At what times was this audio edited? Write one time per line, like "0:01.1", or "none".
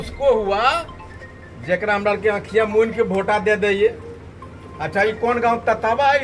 none